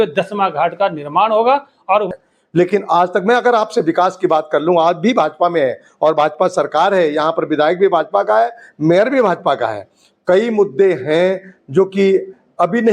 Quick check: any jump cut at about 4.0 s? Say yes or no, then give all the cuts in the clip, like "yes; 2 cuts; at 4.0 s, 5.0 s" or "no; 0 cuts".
no; 1 cut; at 2.1 s